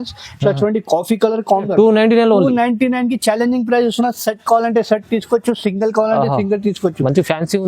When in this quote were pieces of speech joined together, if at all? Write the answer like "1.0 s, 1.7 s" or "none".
1.6 s